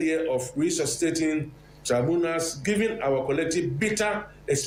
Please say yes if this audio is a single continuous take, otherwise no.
yes